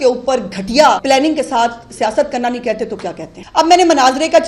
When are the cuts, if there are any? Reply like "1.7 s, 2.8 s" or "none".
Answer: 1.0 s, 3.3 s